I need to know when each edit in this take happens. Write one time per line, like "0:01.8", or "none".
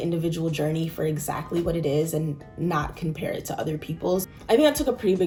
none